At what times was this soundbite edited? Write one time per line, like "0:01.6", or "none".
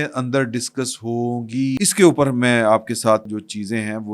0:01.8
0:03.3